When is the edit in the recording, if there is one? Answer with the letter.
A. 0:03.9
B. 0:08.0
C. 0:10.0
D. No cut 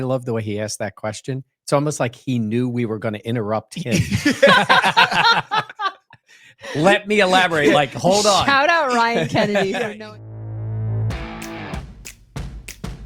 C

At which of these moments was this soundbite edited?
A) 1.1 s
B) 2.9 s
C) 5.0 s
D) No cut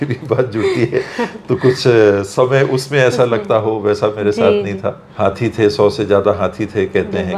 C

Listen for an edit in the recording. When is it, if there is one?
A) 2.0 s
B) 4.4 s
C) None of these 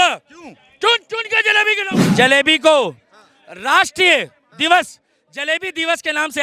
A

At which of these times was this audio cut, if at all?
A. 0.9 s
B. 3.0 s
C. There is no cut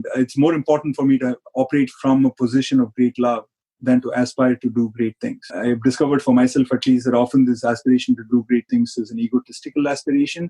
C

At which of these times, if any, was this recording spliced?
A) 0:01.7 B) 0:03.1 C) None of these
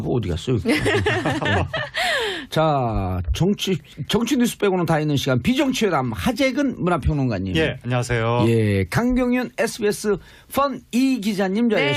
C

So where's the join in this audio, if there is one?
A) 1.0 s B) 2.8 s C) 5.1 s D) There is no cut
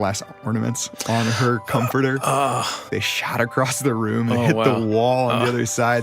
B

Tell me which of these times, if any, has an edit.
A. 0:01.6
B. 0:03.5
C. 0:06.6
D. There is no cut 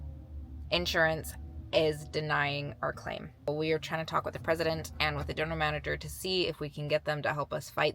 B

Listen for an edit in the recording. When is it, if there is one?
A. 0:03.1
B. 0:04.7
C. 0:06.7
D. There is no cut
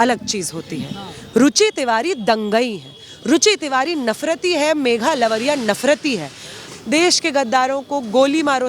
C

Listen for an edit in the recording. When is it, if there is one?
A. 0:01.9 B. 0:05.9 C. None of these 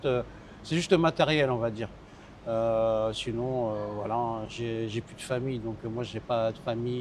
C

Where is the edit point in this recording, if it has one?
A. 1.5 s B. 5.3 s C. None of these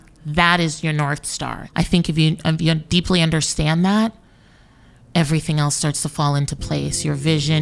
A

